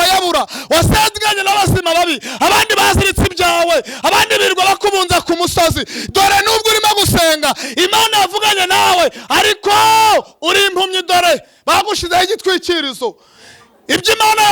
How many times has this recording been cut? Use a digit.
0